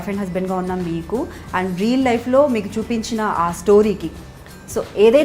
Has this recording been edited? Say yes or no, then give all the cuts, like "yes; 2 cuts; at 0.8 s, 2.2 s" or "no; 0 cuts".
no; 0 cuts